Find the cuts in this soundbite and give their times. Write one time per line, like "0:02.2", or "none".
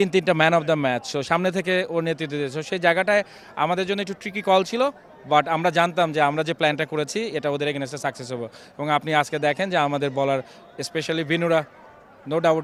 none